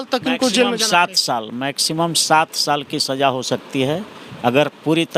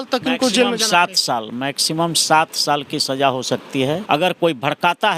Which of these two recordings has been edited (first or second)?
second